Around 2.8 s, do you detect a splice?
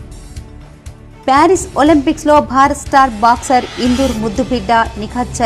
no; 1 cut; at 1.2 s

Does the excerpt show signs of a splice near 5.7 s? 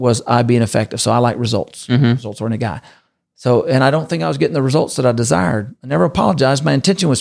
yes; 1 cut; at 5.7 s

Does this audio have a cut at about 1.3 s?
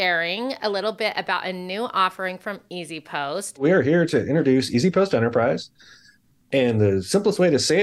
no; 1 cut; at 3.6 s

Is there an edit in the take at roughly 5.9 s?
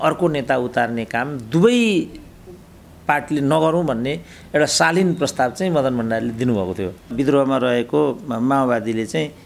no; 1 cut; at 7.1 s

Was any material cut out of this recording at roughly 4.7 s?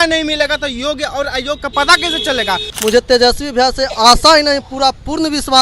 no; 1 cut; at 2.7 s

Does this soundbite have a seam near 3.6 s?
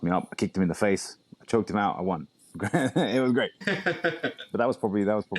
yes; 1 cut; at 3.6 s

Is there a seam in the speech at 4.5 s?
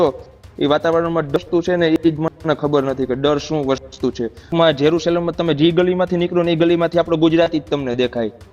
yes; 1 cut; at 4.5 s

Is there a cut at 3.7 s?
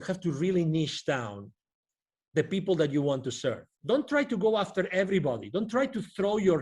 yes; 1 cut; at 3.7 s

